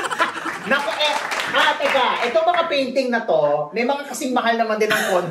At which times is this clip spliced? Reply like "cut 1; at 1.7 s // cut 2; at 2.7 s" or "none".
none